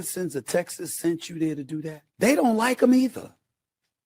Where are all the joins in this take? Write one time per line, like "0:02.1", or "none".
0:02.0